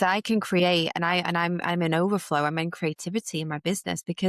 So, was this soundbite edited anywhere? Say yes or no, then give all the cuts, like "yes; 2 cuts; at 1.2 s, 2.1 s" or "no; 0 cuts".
no; 0 cuts